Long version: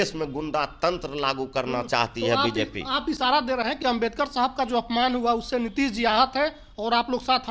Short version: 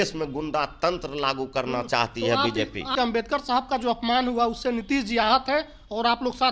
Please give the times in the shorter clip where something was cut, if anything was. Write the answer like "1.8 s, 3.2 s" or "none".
2.9 s